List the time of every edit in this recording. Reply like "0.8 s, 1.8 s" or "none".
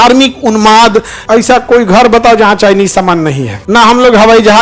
1.2 s, 3.5 s